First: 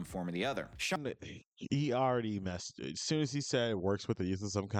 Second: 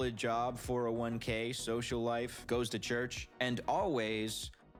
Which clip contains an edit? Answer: first; 1 cut; at 1.0 s

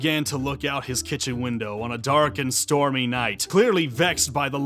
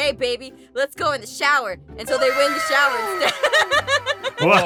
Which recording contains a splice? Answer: first; 1 cut; at 3.3 s

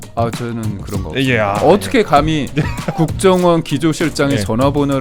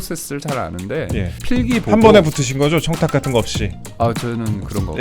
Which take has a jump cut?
second; 1 cut; at 1.4 s

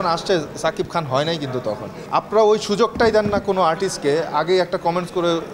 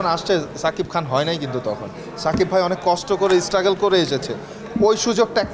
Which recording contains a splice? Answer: first; 1 cut; at 1.9 s

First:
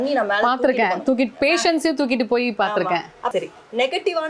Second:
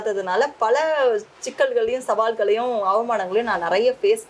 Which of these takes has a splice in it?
first; 1 cut; at 3.3 s

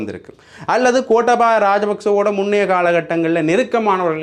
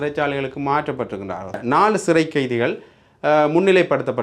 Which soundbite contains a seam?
second; 1 cut; at 1.6 s

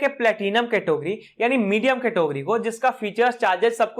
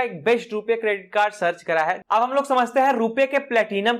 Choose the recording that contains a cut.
second; 1 cut; at 2.0 s

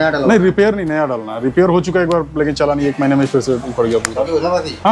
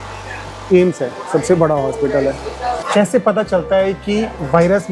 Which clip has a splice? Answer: second; 1 cut; at 2.7 s

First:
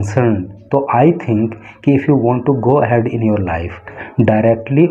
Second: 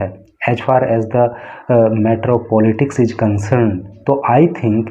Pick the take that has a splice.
first; 1 cut; at 4.0 s

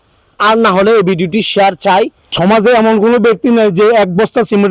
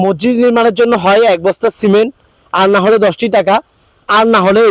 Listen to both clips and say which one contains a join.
first; 1 cut; at 2.2 s

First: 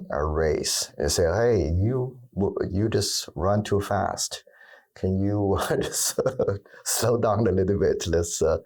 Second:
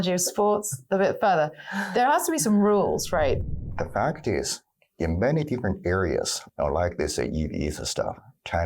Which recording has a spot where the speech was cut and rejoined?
second; 2 cuts; at 3.4 s, 6.4 s

